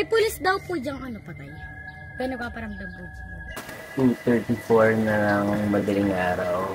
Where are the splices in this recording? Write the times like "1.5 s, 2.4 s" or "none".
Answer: 3.6 s